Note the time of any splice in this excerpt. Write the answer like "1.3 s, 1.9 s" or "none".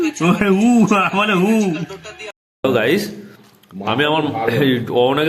2.3 s